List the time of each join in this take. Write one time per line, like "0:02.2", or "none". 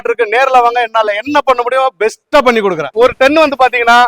0:02.9